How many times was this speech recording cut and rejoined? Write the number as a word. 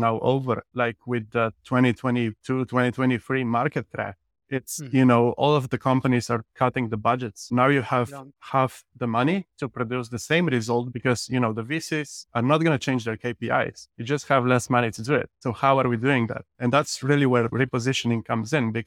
two